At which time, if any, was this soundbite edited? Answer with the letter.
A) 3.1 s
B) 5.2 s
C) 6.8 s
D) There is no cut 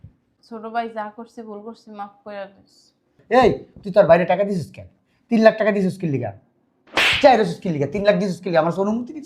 A